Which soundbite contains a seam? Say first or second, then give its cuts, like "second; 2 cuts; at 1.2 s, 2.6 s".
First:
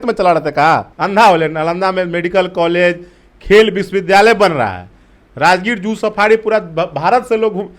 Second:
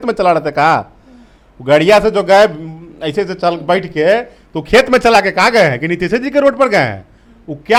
first; 1 cut; at 0.9 s